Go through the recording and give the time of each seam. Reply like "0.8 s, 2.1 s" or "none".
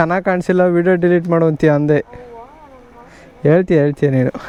none